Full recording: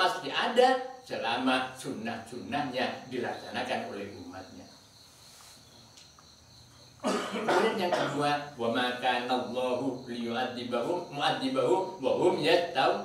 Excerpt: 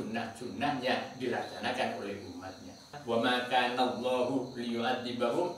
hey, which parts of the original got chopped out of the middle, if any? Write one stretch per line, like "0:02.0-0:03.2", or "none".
0:04.9-0:08.5